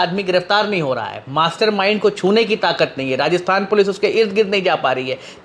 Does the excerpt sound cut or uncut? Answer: uncut